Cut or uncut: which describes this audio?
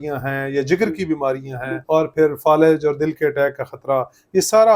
cut